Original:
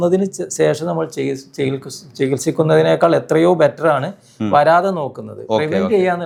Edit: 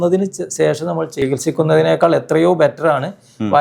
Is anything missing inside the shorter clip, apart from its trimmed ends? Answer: yes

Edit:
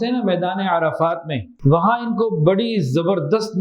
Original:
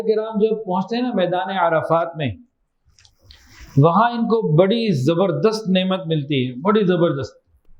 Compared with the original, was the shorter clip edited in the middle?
yes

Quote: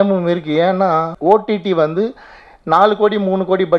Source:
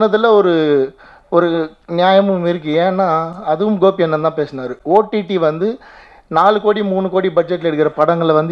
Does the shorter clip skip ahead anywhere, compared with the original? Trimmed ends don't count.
yes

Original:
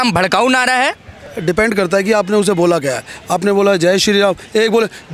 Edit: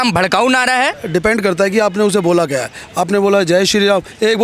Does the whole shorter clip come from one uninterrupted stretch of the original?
no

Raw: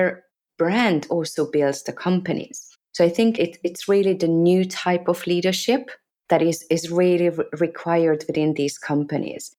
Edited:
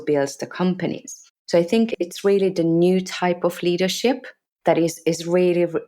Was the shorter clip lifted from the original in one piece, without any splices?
no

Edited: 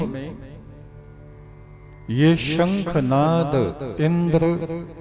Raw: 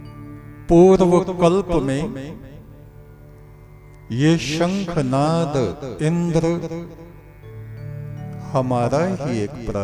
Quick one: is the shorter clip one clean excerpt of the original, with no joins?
yes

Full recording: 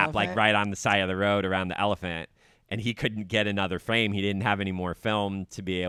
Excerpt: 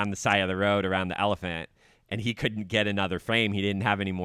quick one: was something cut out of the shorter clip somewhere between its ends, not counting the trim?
no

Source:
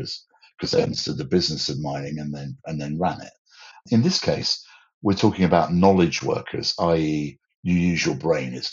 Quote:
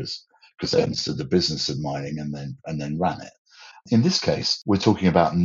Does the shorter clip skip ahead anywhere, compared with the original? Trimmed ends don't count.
yes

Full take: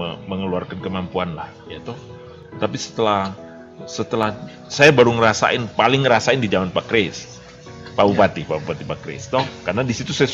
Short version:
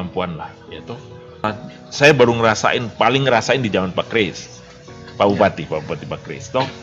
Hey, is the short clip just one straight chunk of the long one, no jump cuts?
no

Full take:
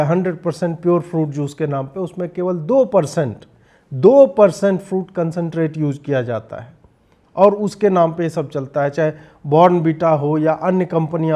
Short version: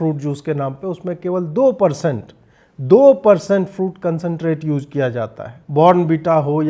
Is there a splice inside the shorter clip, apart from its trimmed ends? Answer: yes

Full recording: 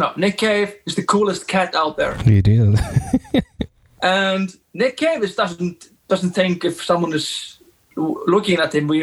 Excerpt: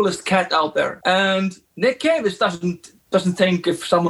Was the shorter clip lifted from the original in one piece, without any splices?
no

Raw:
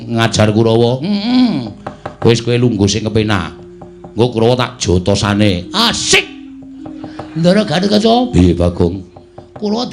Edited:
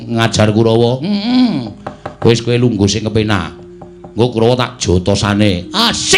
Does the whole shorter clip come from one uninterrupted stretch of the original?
yes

